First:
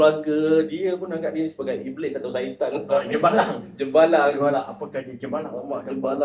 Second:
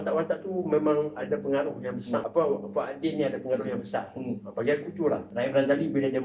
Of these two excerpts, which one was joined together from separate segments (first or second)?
second